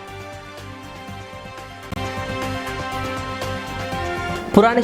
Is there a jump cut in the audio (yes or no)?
no